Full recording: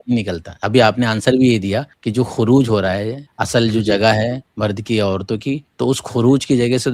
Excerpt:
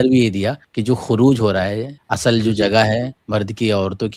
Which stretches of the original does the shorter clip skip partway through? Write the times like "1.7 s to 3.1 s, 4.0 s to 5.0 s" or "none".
none